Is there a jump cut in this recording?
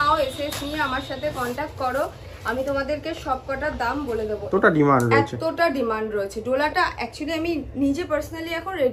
yes; 1 cut; at 4.5 s

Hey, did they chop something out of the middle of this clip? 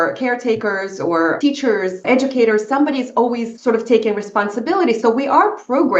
yes; 2 cuts; at 1.4 s, 3.5 s

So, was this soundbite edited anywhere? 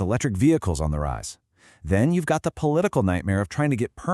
no; 0 cuts

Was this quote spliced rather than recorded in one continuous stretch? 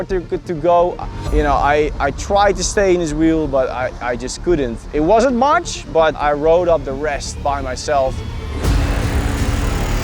yes; 1 cut; at 1.0 s

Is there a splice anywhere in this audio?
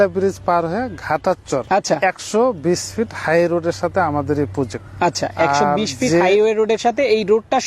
yes; 2 cuts; at 1.6 s, 4.8 s

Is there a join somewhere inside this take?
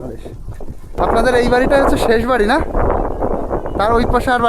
yes; 1 cut; at 1.0 s

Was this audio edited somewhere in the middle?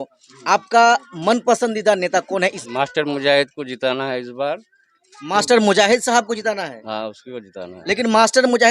yes; 1 cut; at 2.6 s

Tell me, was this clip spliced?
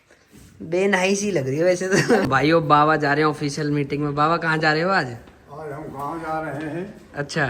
yes; 1 cut; at 2.2 s

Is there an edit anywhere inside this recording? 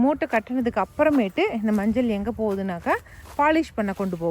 no; 0 cuts

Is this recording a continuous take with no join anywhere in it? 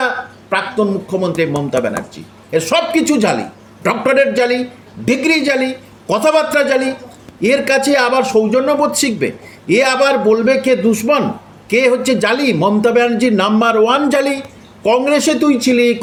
yes; 0 cuts

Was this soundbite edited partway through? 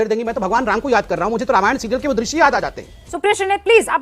no; 0 cuts

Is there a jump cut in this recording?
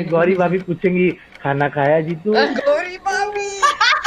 no; 0 cuts

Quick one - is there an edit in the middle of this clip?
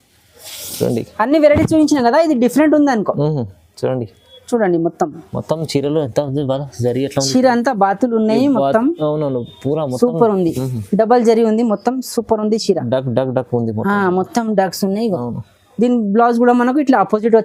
no; 0 cuts

